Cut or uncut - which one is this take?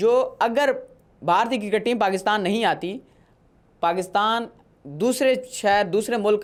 uncut